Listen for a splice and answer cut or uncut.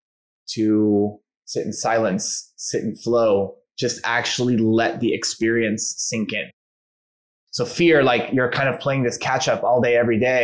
cut